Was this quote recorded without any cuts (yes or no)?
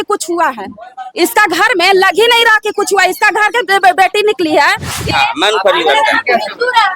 no